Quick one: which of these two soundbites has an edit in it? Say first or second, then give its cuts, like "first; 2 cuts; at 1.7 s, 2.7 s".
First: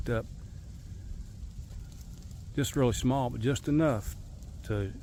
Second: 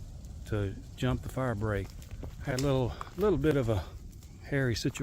second; 1 cut; at 1.9 s